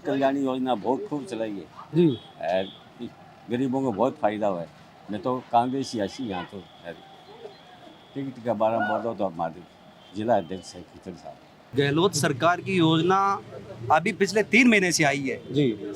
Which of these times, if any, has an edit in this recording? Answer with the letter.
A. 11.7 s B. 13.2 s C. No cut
A